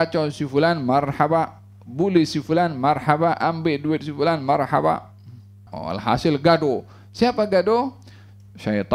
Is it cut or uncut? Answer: cut